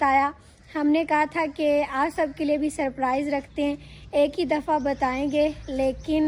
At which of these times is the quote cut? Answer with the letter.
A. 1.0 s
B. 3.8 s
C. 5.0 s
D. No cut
D